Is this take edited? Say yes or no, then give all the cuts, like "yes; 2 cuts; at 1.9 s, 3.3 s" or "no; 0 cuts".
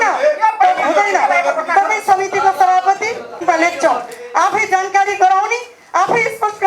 yes; 1 cut; at 3.3 s